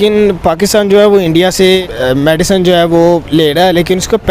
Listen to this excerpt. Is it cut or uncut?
uncut